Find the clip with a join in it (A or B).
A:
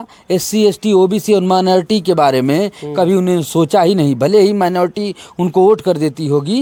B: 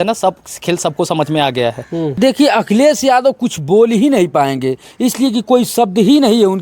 B